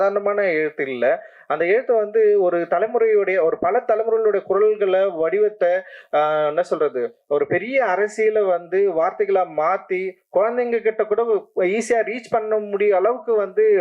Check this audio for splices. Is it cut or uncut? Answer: uncut